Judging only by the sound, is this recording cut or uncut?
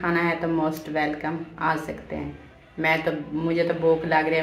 uncut